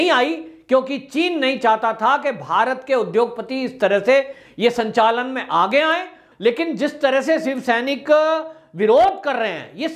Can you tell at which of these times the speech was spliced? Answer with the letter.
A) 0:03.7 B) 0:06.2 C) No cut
B